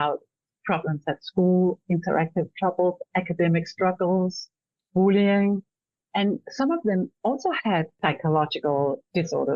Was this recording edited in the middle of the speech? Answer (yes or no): yes